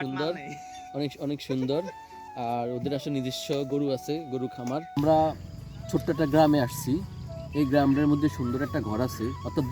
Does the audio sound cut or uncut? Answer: cut